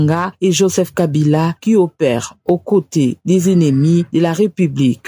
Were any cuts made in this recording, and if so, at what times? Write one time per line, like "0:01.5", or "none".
none